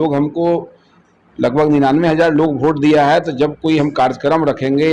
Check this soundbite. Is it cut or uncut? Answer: uncut